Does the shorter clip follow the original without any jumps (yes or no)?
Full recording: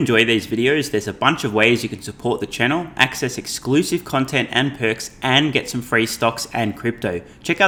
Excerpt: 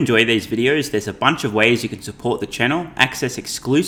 yes